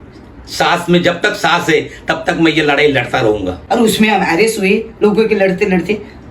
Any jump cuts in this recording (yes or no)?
yes